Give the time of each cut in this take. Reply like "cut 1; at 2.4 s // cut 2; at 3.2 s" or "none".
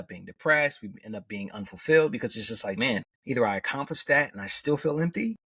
cut 1; at 3.1 s